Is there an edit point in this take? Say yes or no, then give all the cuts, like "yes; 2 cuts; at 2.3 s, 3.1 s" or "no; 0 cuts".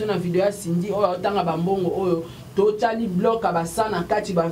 no; 0 cuts